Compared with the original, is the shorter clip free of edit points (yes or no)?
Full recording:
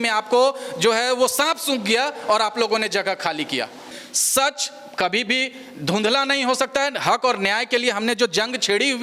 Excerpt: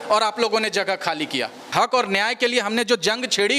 no